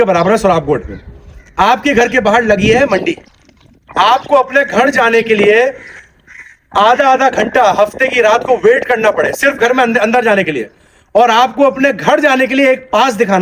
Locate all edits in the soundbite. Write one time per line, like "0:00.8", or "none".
none